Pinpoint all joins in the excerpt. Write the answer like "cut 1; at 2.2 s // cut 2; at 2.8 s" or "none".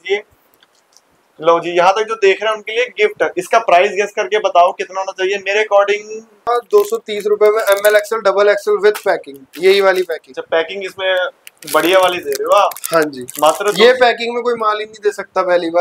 cut 1; at 6.5 s